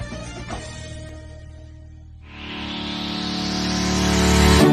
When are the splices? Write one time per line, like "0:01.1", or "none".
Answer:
0:01.1